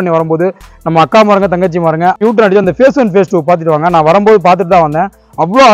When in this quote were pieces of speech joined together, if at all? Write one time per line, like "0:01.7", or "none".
0:02.2